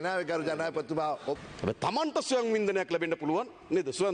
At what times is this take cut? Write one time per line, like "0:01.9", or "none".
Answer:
0:01.4